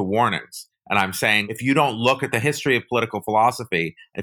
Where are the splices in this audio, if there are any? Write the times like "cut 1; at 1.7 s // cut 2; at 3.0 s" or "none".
cut 1; at 1.4 s